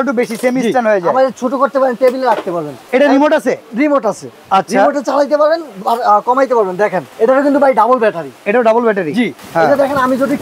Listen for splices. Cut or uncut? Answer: cut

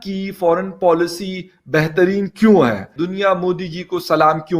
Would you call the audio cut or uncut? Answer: cut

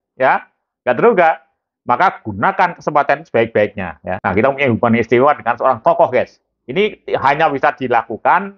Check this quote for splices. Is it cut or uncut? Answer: cut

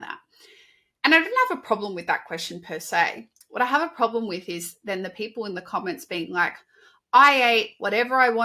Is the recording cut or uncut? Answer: uncut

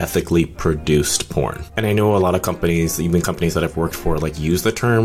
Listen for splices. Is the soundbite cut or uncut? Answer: cut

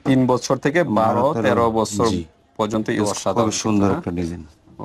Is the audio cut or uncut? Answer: cut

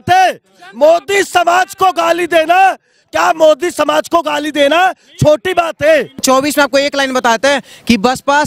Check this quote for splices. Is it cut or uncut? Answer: cut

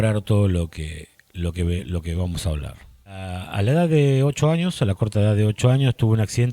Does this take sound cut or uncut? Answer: cut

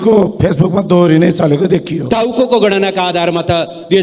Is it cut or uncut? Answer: cut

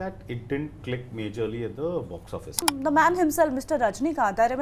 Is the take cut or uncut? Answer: cut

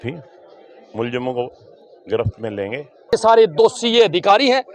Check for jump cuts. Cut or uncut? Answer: cut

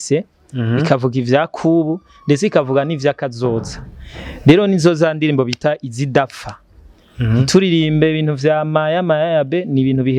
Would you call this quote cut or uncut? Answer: uncut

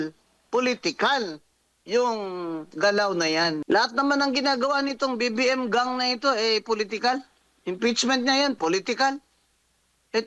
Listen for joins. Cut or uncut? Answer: cut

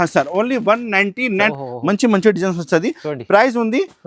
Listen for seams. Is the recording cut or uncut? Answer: cut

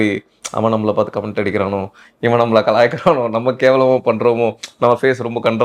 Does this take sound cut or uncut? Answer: uncut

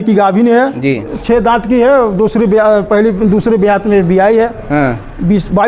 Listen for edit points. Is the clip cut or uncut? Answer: cut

